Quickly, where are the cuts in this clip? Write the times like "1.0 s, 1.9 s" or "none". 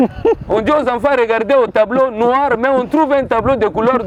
none